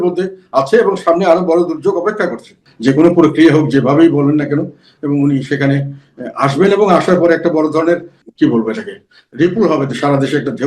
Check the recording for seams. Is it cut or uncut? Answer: cut